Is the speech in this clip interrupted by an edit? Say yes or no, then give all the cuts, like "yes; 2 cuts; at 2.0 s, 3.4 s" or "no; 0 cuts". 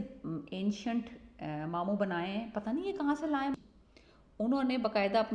yes; 1 cut; at 3.5 s